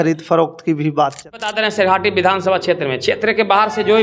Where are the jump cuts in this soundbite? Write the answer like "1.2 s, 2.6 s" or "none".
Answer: 1.4 s